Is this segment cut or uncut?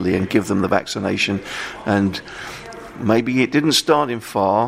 uncut